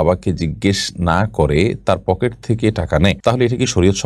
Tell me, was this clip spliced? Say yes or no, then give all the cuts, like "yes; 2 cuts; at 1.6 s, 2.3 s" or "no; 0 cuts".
no; 0 cuts